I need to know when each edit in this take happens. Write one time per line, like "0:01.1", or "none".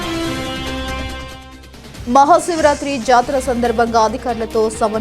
0:01.8